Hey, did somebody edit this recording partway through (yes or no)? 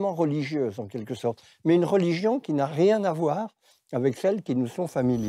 no